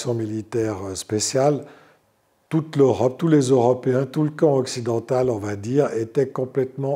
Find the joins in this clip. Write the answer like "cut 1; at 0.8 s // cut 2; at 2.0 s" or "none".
none